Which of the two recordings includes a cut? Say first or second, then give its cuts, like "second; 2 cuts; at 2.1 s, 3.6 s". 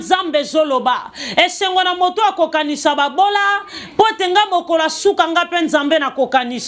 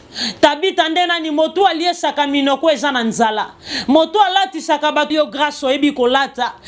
second; 1 cut; at 5.1 s